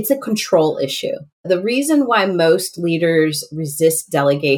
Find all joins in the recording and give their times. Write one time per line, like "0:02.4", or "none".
0:01.4